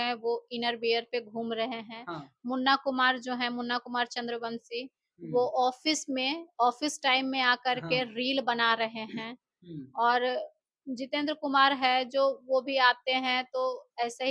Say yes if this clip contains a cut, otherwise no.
no